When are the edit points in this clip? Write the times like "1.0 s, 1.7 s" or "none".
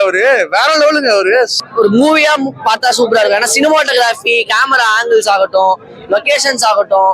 1.6 s